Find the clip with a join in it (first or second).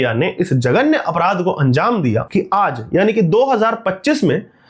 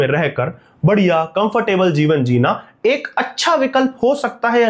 first